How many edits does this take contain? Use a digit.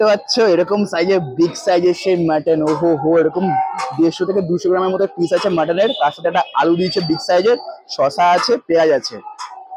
0